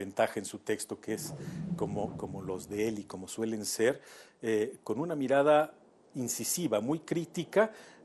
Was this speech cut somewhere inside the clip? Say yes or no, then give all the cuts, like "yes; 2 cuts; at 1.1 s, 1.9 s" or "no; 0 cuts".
no; 0 cuts